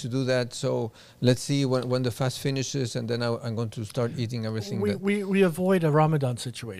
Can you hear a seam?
no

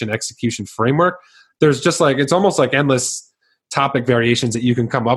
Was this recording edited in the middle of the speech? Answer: no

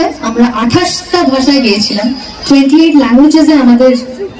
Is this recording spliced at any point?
no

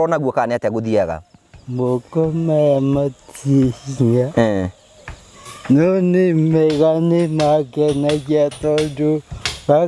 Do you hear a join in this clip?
no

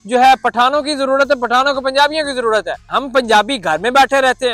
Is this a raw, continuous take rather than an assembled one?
no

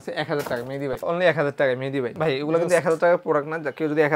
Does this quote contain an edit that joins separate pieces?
yes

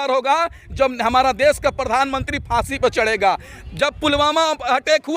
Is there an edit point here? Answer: no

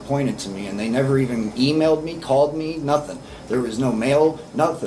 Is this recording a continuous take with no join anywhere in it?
yes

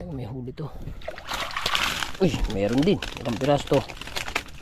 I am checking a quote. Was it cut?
no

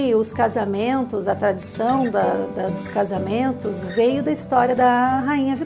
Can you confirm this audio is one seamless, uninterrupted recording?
no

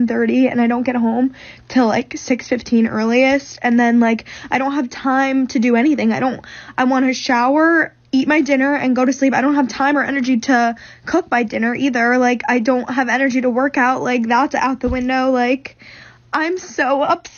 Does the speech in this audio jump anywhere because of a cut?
no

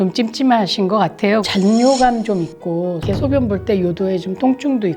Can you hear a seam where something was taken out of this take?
yes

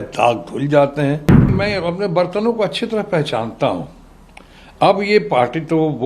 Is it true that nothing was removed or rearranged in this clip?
no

